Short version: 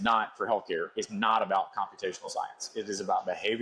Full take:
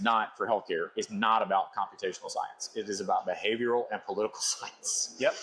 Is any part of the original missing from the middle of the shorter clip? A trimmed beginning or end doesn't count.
no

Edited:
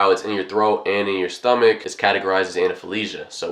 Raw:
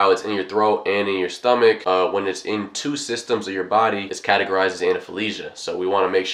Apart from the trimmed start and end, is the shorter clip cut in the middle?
yes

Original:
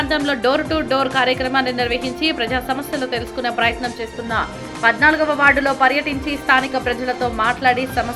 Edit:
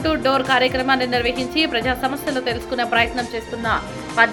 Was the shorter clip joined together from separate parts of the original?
no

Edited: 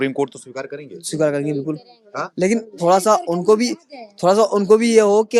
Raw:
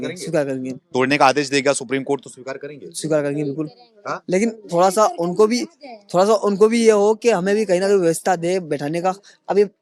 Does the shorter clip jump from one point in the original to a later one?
no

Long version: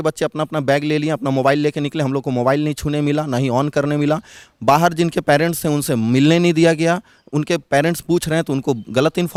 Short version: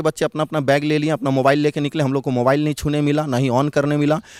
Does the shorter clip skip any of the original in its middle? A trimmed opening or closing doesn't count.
no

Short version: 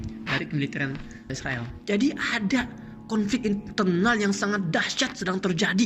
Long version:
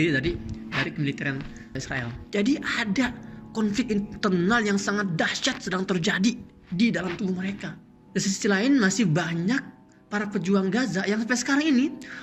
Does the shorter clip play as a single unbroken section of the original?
yes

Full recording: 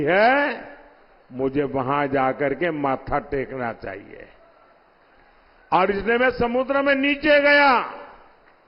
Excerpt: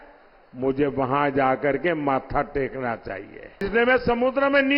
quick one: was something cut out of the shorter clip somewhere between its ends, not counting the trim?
yes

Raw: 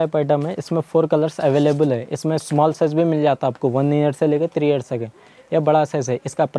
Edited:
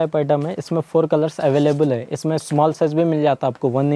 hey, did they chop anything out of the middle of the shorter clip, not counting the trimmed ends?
no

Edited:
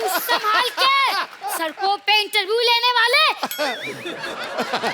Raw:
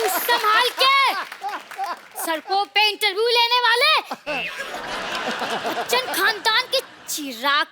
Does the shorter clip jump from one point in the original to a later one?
yes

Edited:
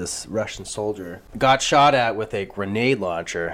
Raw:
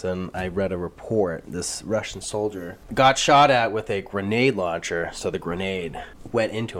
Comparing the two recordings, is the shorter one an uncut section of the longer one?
yes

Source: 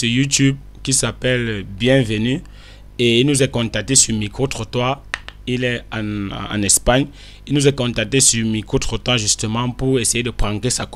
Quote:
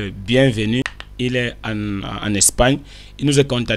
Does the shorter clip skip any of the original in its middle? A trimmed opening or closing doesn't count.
yes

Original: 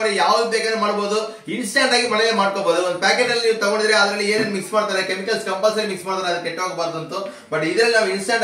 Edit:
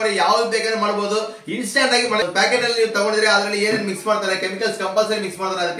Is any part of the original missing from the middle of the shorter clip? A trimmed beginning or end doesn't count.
yes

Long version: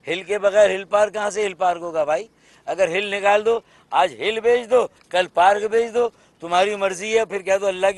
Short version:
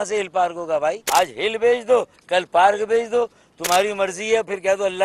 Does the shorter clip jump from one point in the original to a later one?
yes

